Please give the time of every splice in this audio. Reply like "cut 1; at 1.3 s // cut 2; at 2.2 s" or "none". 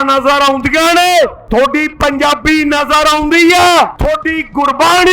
cut 1; at 1.4 s // cut 2; at 4.0 s